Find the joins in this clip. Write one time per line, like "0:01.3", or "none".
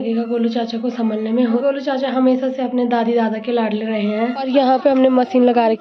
0:01.6
0:04.5